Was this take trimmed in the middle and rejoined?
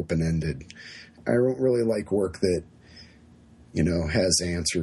yes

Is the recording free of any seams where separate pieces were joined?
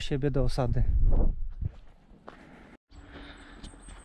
no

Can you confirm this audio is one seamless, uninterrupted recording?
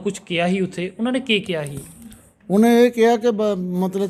yes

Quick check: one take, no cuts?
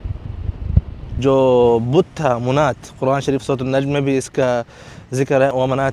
no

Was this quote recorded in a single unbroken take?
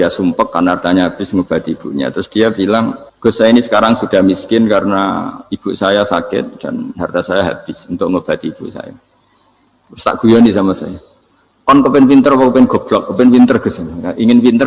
no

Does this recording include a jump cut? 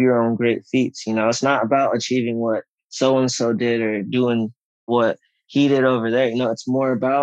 yes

